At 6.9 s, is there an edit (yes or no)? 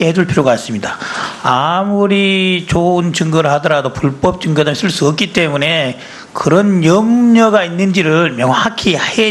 yes